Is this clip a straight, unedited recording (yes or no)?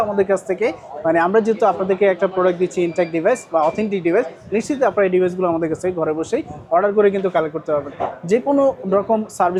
yes